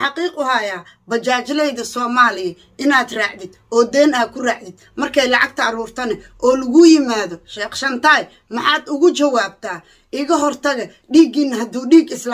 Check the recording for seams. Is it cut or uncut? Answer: uncut